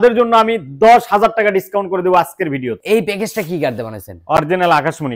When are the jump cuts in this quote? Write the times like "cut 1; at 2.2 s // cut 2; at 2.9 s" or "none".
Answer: cut 1; at 2.8 s